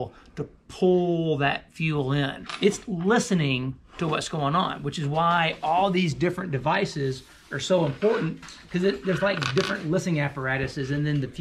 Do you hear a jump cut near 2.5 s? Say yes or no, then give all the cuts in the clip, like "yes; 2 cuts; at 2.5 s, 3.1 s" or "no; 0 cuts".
yes; 1 cut; at 2.5 s